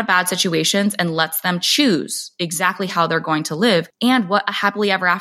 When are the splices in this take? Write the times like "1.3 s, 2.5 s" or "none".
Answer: 3.9 s